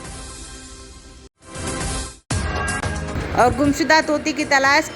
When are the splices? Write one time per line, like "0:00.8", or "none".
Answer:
0:01.1